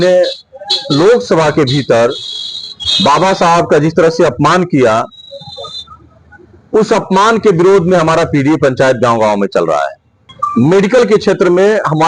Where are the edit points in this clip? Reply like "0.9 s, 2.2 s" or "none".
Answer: 10.4 s